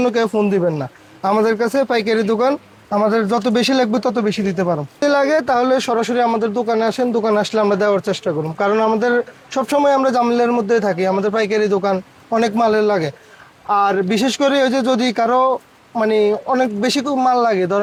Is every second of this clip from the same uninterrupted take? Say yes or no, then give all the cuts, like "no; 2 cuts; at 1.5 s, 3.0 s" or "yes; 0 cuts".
yes; 0 cuts